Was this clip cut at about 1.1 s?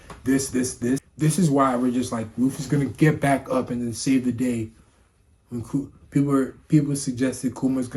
yes; 1 cut; at 1.1 s

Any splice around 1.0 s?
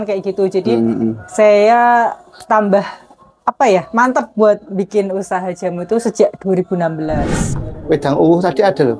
no; 1 cut; at 7.4 s

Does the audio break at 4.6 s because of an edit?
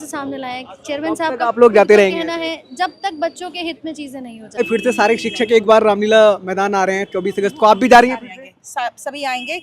yes; 1 cut; at 4.6 s

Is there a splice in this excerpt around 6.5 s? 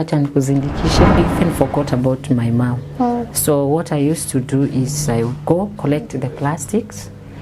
no; 1 cut; at 1.2 s

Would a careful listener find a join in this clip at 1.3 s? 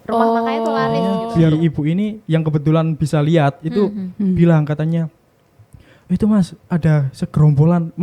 yes; 1 cut; at 1.3 s

